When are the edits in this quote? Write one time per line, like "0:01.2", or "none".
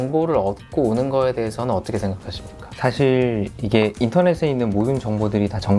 none